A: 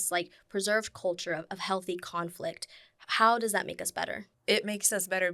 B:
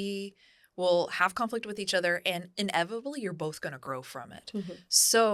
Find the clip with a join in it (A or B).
A